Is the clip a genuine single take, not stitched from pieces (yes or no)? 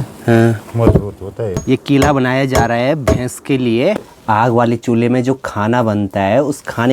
no